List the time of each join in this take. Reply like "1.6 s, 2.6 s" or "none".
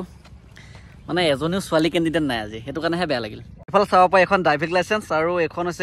3.6 s